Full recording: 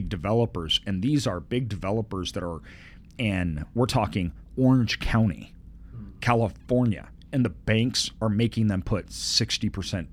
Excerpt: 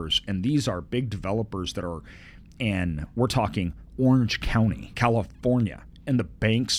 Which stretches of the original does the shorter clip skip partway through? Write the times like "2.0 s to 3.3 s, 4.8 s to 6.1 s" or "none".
5.4 s to 6.1 s